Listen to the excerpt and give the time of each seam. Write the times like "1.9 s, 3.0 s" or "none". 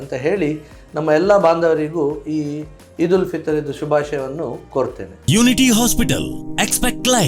none

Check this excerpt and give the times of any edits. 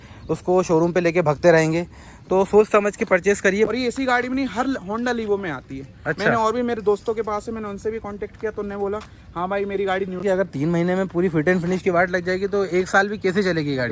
3.7 s, 10.2 s

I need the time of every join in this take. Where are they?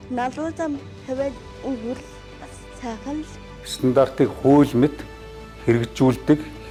none

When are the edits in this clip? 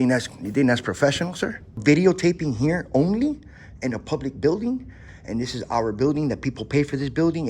1.8 s

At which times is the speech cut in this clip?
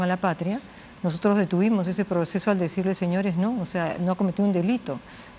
none

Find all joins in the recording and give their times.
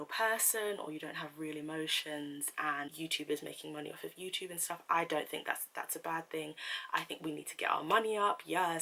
2.9 s

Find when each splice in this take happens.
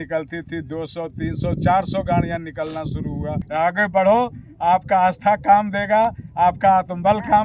3.4 s

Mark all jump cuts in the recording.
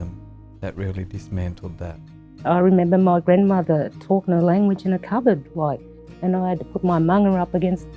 2.4 s, 6.0 s

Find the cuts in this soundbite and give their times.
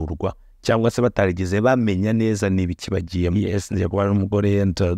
3.3 s

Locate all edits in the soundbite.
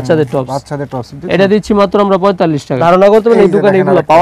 2.8 s

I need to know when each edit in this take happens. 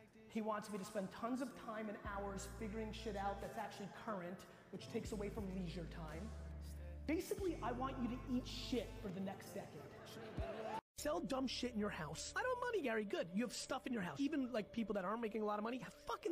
10.8 s

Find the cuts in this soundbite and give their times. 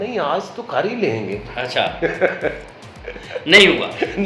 none

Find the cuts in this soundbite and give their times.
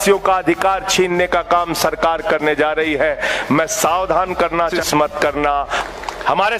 4.8 s, 5.7 s

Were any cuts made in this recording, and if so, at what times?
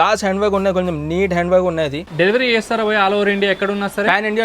2.0 s

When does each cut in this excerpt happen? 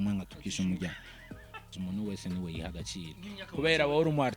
1.6 s

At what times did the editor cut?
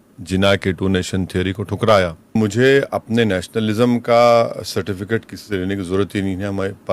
2.4 s

